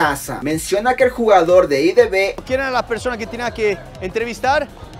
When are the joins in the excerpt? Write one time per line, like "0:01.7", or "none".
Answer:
0:02.3